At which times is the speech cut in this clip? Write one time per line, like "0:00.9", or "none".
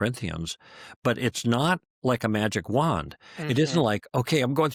none